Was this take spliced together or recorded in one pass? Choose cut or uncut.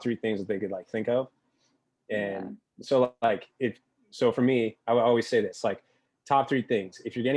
uncut